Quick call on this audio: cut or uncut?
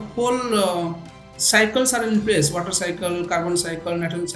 uncut